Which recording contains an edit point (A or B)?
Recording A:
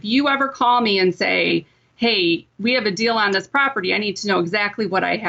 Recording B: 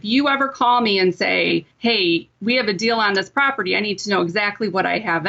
B